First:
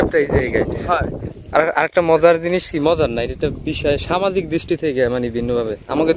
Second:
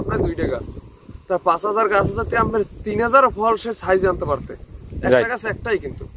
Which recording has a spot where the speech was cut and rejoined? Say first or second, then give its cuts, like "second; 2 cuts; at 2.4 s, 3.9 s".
first; 1 cut; at 1.3 s